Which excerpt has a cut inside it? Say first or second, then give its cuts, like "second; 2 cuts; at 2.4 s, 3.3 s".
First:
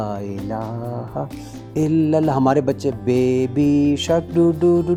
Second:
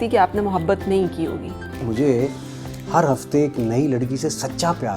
second; 1 cut; at 1.9 s